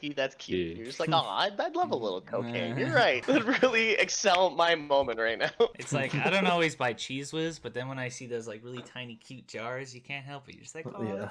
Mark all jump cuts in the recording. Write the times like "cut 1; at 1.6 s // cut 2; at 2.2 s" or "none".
cut 1; at 3.2 s // cut 2; at 5.8 s